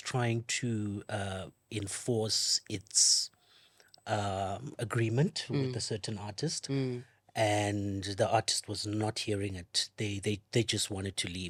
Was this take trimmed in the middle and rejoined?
no; 0 cuts

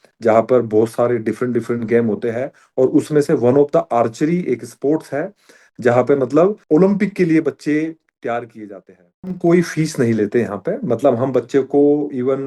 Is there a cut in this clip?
yes; 2 cuts; at 6.6 s, 9.3 s

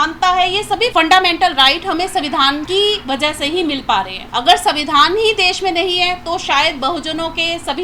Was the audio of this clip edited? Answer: yes; 3 cuts; at 0.9 s, 2.6 s, 4.2 s

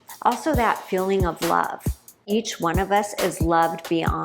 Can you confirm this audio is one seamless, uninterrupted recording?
no; 1 cut; at 2.2 s

